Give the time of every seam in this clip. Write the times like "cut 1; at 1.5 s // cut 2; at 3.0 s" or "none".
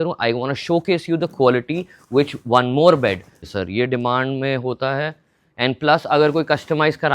cut 1; at 3.4 s